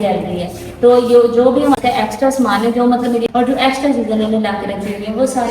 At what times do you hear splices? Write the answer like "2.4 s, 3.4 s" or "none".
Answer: 1.8 s, 3.2 s